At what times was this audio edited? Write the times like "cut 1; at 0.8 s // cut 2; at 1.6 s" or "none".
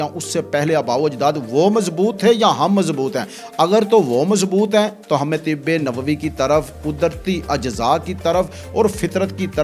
none